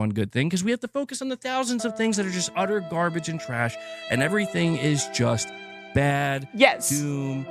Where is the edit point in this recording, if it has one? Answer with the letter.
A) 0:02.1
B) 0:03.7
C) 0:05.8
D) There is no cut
D